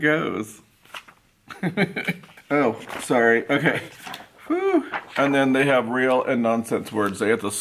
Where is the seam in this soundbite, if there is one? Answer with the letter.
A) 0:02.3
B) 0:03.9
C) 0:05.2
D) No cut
A